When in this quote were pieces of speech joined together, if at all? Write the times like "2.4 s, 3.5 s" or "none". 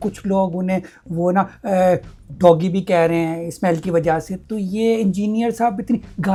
none